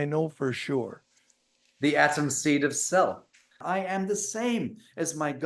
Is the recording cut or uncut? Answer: cut